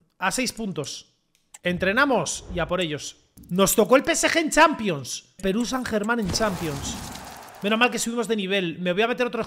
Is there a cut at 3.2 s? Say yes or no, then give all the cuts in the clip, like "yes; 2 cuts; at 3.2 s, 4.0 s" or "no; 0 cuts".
yes; 1 cut; at 3.2 s